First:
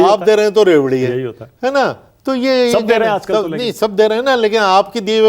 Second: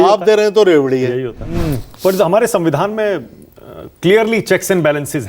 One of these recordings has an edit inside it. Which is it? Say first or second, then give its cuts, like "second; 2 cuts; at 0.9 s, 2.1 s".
second; 1 cut; at 1.5 s